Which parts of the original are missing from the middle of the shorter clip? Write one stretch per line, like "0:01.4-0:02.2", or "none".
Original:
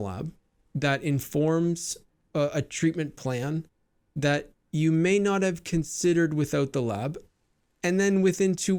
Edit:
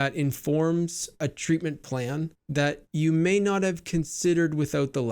0:02.1-0:02.5
0:04.1-0:04.5